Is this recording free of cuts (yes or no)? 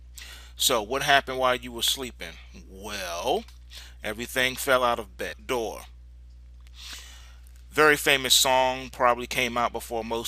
yes